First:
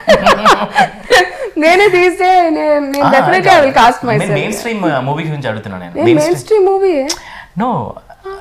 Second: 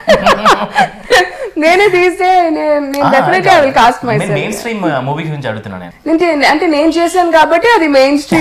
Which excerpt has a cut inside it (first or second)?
second